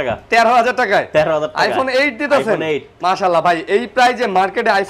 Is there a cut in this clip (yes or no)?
no